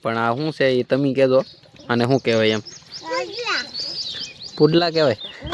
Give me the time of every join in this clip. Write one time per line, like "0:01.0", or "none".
none